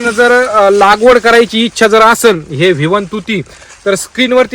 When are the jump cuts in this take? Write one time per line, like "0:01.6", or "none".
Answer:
none